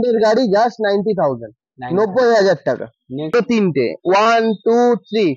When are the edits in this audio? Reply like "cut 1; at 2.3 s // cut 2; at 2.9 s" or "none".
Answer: cut 1; at 3.3 s